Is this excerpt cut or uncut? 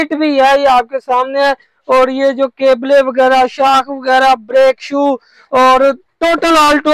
uncut